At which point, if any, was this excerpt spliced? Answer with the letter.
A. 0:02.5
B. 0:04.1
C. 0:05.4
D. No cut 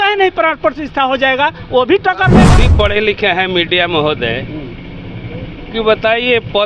A